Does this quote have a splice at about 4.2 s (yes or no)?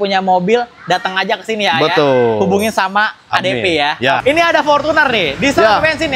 yes